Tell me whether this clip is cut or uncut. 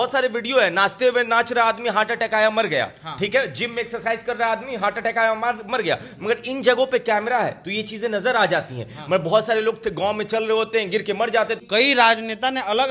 cut